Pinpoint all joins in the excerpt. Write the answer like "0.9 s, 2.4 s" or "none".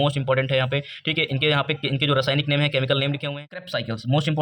3.5 s

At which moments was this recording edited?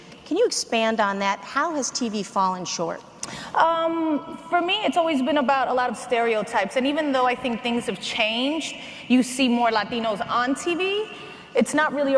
3.8 s

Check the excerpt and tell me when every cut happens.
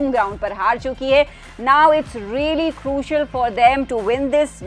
none

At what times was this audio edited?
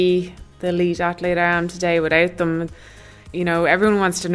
3.1 s

